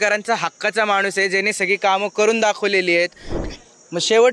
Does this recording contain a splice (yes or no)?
yes